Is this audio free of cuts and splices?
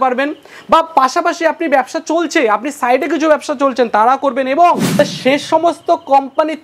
no; 1 cut; at 4.9 s

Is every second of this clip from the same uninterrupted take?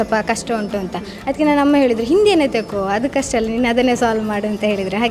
yes; 0 cuts

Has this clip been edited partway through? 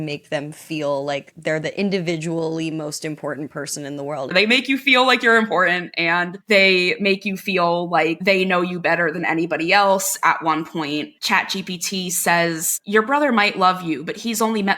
yes; 3 cuts; at 4.3 s, 10.1 s, 11.1 s

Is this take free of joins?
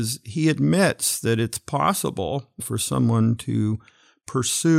no; 1 cut; at 2.6 s

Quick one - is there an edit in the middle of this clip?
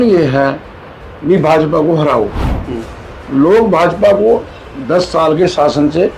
no; 0 cuts

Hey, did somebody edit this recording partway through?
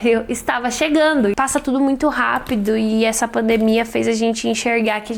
yes; 1 cut; at 1.3 s

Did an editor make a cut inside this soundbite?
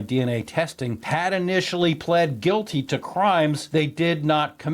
yes; 2 cuts; at 1.0 s, 3.6 s

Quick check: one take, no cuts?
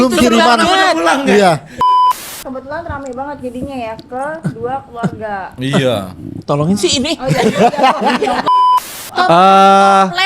no; 2 cuts; at 1.9 s, 8.9 s

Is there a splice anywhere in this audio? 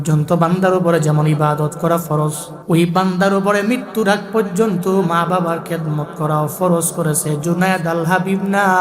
yes; 1 cut; at 2.5 s

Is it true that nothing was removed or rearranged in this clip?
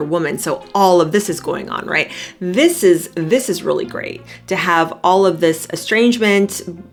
yes; 0 cuts

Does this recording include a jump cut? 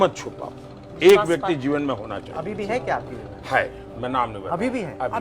no; 0 cuts

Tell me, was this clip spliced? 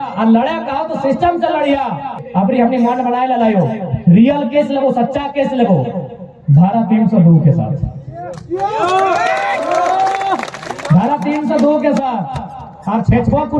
yes; 1 cut; at 2.1 s

